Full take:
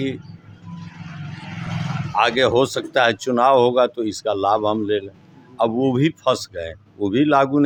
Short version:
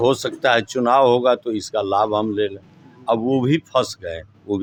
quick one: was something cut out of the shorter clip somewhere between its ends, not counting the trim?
no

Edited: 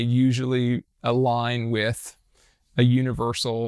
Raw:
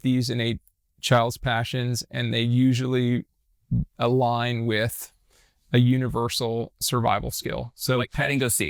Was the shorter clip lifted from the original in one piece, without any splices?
no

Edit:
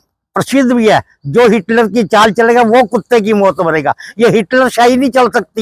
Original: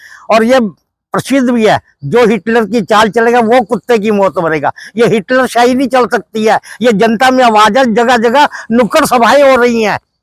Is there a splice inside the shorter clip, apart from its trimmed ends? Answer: no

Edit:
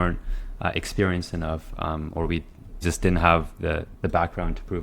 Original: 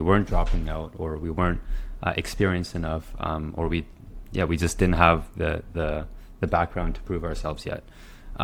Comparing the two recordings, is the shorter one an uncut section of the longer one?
no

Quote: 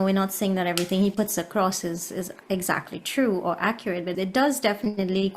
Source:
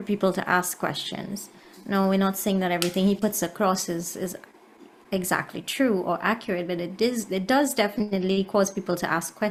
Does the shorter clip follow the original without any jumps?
no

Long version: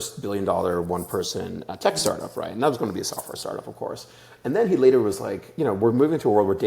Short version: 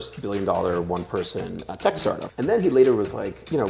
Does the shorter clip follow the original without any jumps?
no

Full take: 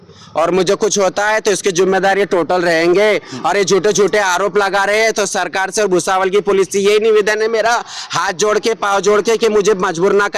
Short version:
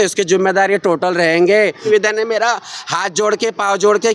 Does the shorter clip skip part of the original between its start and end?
yes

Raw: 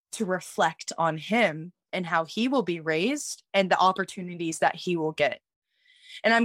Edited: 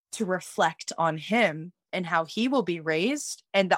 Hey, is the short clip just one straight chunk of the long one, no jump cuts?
yes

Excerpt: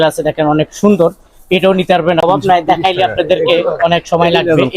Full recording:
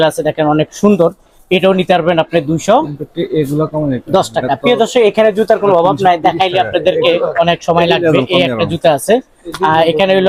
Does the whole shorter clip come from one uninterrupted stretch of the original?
no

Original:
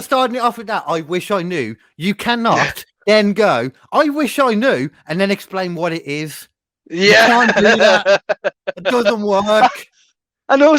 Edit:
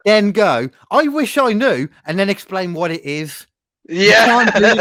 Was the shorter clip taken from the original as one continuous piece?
yes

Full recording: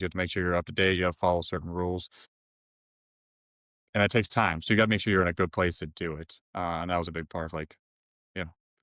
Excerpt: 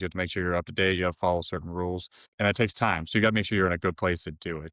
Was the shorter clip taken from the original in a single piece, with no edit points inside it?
no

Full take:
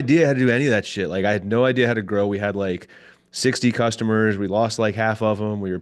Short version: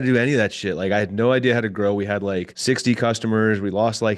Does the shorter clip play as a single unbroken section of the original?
no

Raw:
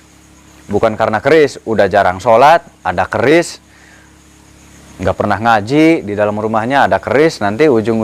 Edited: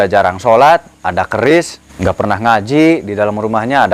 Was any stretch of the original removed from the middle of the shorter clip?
yes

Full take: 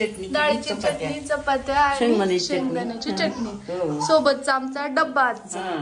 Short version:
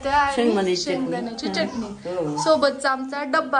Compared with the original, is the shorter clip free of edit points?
yes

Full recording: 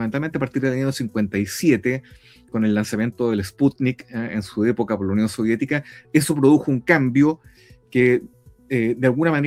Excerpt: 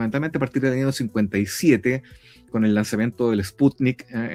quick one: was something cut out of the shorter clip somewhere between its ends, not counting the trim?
no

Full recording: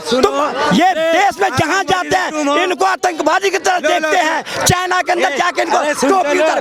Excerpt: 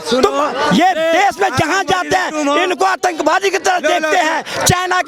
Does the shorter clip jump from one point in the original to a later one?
no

